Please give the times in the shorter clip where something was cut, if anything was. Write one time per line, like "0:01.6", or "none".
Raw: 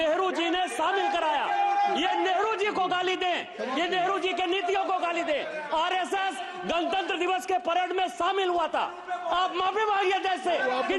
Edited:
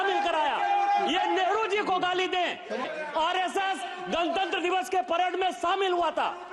0:02.9